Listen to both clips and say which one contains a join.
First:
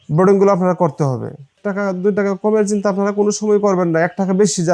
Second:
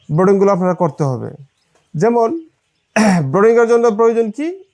first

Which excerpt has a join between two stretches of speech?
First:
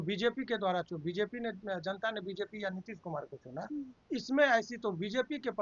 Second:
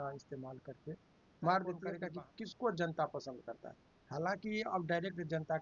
second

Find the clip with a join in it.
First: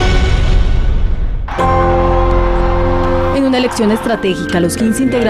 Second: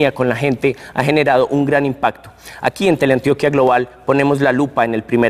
first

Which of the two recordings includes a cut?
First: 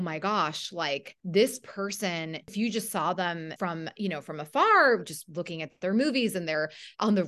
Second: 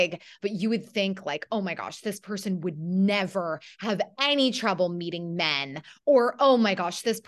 first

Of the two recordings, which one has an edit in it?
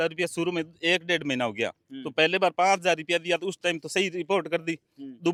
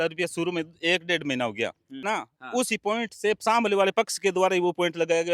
second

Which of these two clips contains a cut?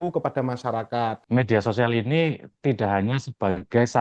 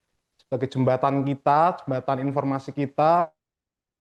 first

